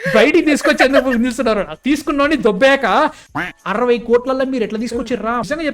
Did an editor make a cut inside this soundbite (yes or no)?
yes